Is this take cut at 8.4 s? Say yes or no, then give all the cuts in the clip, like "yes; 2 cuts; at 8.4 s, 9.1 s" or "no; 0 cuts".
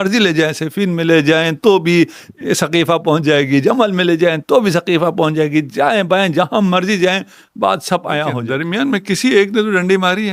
yes; 1 cut; at 8.4 s